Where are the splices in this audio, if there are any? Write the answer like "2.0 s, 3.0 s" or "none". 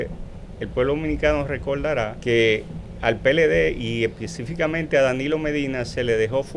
2.2 s